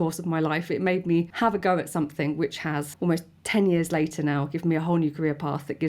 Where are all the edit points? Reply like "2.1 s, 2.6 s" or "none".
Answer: 1.3 s, 2.9 s